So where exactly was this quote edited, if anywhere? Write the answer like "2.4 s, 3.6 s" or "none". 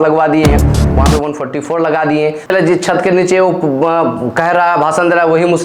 2.5 s